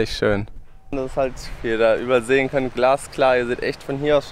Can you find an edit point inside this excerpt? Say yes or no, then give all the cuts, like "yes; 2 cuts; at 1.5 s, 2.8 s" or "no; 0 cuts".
yes; 1 cut; at 0.9 s